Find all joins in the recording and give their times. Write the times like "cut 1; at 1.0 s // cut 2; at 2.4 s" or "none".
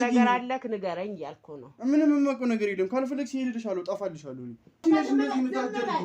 cut 1; at 4.8 s